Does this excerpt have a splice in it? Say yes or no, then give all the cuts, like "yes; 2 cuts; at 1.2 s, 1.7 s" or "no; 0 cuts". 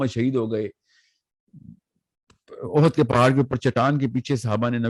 no; 0 cuts